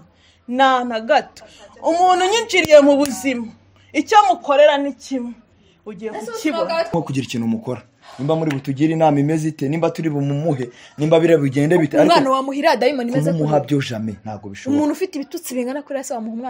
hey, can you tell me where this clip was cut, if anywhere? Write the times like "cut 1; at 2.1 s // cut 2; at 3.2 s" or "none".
cut 1; at 6.9 s